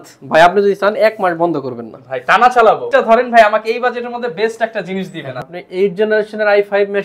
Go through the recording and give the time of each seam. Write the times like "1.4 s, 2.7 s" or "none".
2.9 s, 5.5 s